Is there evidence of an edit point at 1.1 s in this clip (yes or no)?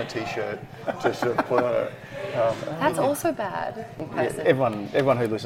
no